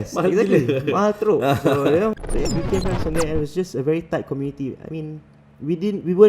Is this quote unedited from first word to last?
no; 1 cut; at 2.3 s

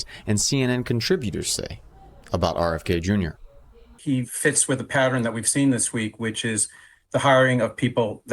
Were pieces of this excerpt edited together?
yes; 1 cut; at 3.9 s

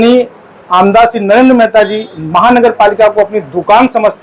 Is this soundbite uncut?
yes; 0 cuts

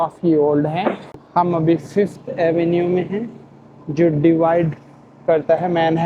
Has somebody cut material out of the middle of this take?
yes; 1 cut; at 1.1 s

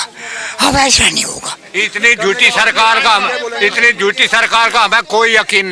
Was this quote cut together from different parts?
yes; 1 cut; at 1.5 s

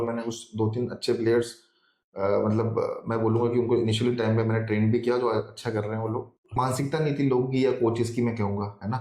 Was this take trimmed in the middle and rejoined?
yes; 1 cut; at 6.5 s

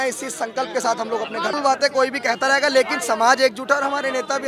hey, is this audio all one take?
no; 1 cut; at 1.6 s

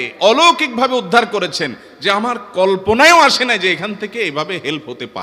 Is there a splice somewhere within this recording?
no; 0 cuts

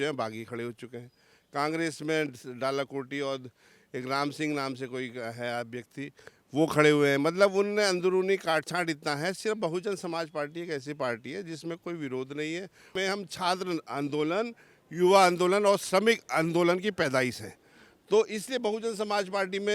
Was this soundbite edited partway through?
yes; 1 cut; at 12.9 s

